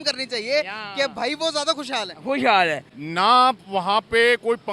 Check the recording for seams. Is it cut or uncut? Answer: cut